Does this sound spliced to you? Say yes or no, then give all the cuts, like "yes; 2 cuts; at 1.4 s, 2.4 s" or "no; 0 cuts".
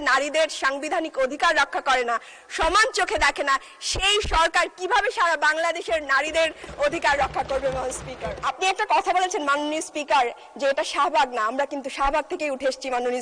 yes; 1 cut; at 8.4 s